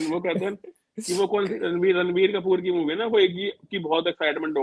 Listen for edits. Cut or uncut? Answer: uncut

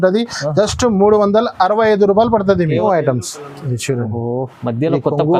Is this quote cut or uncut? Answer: cut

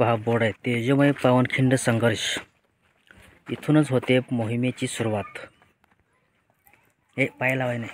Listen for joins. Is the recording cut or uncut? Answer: uncut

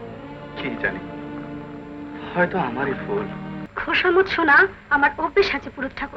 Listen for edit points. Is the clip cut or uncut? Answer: cut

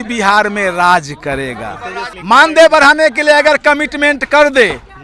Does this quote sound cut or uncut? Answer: cut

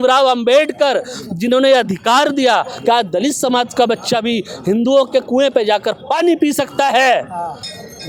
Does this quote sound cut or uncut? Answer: uncut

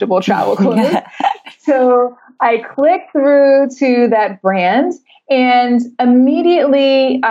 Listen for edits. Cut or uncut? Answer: uncut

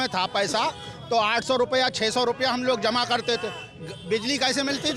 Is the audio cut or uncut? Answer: uncut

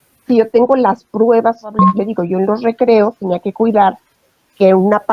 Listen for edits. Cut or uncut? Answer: cut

